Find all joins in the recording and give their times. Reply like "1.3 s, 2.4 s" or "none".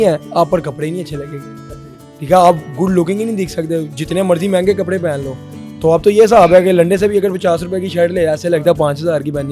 none